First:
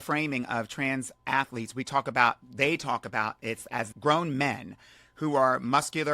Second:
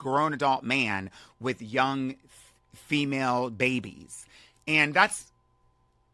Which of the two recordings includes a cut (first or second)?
first